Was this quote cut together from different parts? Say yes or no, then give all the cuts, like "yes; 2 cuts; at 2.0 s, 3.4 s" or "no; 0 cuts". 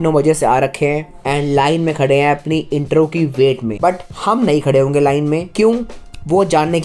yes; 3 cuts; at 1.1 s, 3.7 s, 5.5 s